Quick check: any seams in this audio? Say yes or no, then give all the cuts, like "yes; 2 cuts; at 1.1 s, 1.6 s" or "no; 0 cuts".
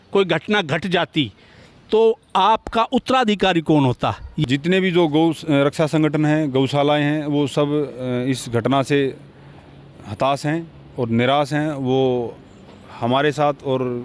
yes; 1 cut; at 4.3 s